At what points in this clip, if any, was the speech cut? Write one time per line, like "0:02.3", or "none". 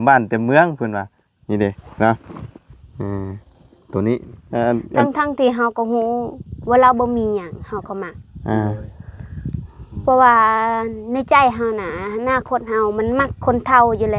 0:04.4